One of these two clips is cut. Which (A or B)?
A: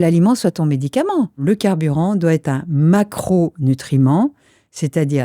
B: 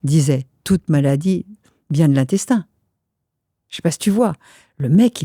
A